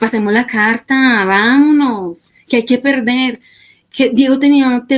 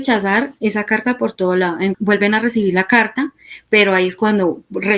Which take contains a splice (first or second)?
second